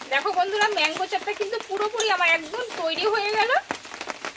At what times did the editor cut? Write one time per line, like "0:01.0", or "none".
none